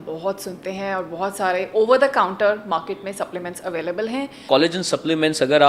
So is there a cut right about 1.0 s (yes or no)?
no